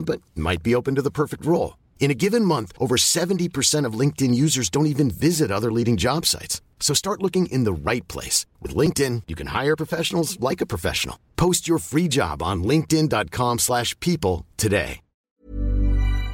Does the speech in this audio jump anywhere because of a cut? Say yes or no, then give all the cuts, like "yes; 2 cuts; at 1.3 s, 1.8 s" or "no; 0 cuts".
yes; 1 cut; at 15.4 s